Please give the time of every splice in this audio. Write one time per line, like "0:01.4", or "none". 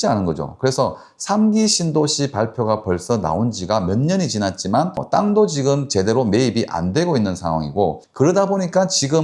none